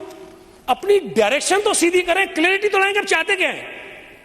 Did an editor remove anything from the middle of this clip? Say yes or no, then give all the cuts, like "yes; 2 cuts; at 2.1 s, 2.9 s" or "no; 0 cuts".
no; 0 cuts